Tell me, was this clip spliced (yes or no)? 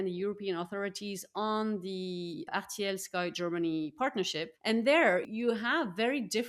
yes